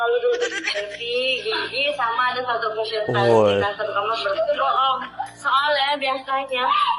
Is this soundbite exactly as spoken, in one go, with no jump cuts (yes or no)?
yes